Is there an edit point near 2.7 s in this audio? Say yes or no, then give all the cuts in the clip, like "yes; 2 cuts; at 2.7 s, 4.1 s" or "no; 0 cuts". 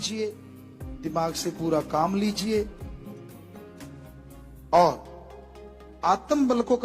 yes; 2 cuts; at 2.7 s, 4.1 s